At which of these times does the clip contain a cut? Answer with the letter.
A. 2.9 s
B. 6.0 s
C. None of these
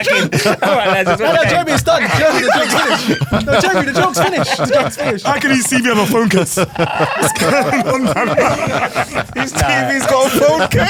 C